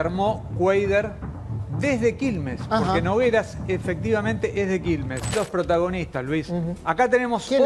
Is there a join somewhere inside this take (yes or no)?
yes